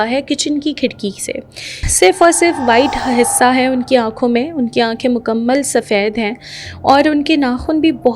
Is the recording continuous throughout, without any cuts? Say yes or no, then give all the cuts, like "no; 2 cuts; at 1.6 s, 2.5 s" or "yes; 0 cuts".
no; 1 cut; at 1.8 s